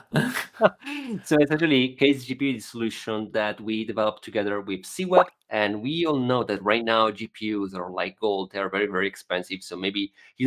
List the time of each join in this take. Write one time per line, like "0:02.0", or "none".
0:05.4